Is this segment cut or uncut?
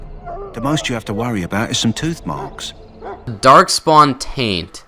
uncut